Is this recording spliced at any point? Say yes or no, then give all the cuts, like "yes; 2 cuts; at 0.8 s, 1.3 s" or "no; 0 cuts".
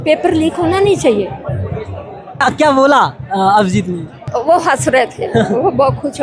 yes; 2 cuts; at 2.4 s, 4.3 s